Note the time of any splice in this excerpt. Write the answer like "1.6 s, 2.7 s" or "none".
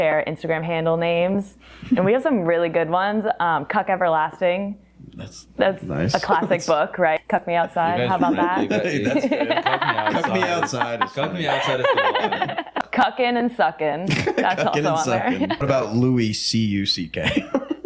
7.3 s, 12.9 s, 15.7 s